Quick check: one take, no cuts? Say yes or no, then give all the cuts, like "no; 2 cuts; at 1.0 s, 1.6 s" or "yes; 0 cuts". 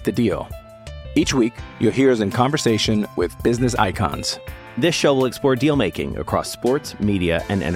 yes; 0 cuts